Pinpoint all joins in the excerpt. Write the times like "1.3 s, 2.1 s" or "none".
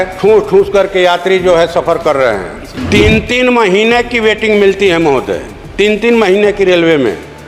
2.7 s